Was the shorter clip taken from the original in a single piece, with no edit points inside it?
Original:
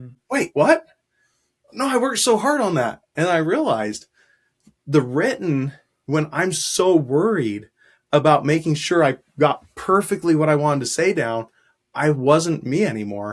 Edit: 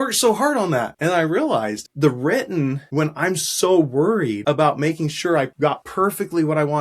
no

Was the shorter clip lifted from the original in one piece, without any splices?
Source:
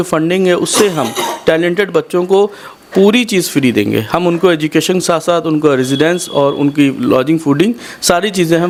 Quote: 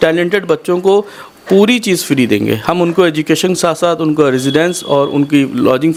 yes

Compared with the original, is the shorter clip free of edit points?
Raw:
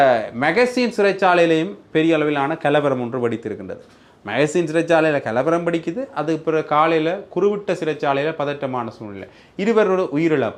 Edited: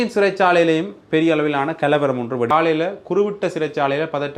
no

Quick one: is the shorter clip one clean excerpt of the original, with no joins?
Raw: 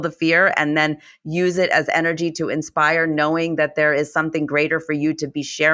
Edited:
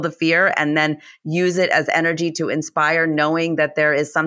yes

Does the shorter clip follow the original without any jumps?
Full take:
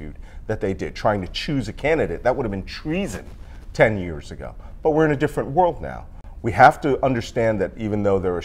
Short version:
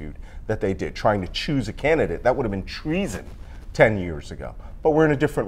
yes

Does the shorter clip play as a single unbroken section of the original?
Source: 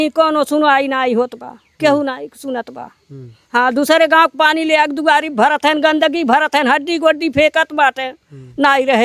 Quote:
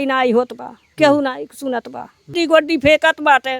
no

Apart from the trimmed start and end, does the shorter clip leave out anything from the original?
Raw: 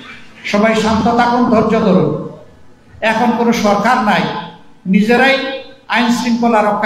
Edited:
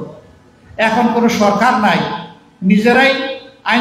no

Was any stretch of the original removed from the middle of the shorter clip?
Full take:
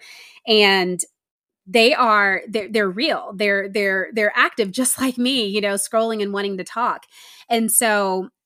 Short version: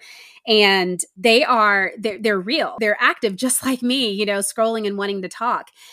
yes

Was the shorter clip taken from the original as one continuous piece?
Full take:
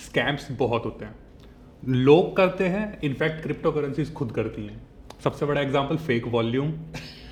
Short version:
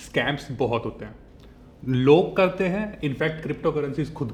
yes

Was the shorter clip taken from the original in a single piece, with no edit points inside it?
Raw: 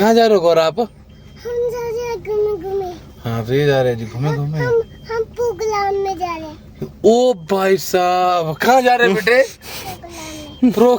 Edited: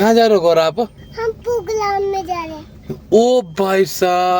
no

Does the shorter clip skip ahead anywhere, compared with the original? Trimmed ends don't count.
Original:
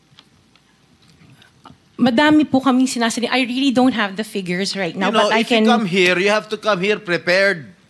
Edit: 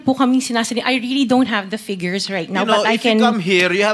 no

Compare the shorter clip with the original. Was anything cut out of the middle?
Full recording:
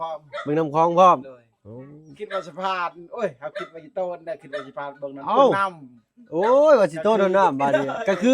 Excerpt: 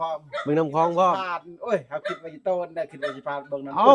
yes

